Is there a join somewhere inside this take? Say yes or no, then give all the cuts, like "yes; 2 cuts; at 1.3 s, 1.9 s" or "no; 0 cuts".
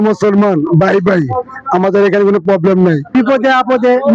no; 0 cuts